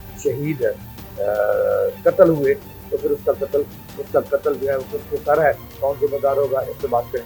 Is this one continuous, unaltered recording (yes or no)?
yes